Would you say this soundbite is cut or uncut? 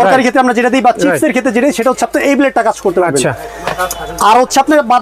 uncut